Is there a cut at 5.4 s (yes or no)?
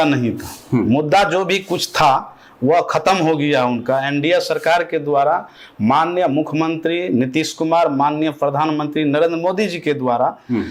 no